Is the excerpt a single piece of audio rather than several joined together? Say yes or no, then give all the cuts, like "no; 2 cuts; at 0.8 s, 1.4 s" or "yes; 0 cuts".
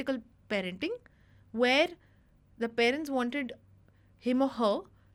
yes; 0 cuts